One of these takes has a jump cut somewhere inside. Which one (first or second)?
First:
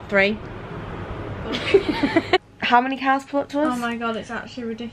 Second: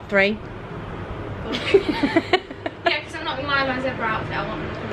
first